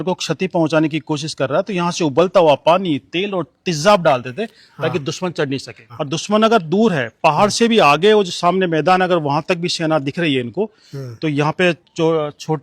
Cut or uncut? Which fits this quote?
cut